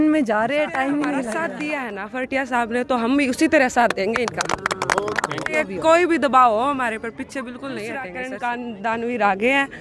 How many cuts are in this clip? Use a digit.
3